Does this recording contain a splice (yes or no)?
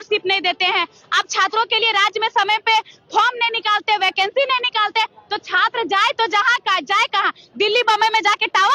no